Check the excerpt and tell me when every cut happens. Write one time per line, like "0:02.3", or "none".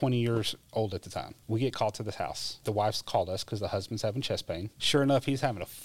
0:01.3
0:02.6
0:04.7